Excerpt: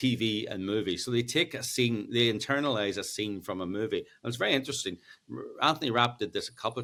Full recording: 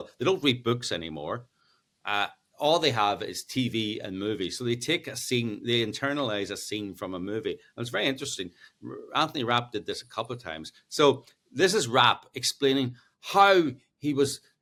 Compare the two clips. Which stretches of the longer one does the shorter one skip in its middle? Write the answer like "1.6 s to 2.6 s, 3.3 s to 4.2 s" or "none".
none